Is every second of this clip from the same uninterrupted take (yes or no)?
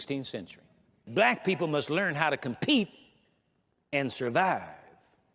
no